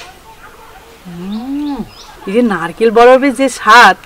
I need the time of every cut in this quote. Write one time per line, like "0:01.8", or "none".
0:02.1

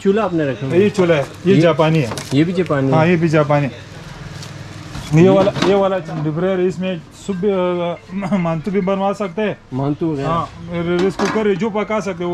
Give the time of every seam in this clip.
0:06.0

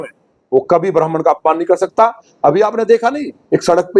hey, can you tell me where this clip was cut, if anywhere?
none

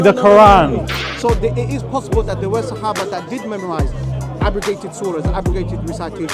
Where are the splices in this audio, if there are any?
0:01.1

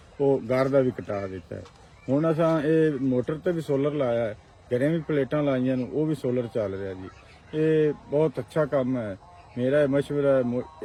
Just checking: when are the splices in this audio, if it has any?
none

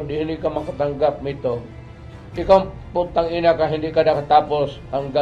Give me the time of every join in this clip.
none

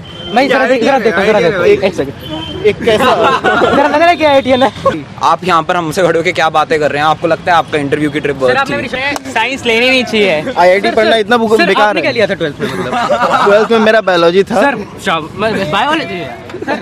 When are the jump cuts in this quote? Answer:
0:05.1
0:09.0

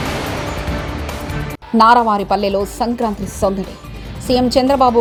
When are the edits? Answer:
none

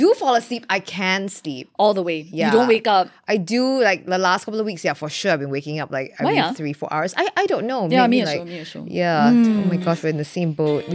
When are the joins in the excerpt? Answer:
none

